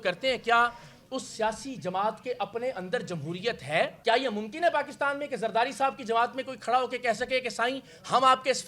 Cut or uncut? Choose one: cut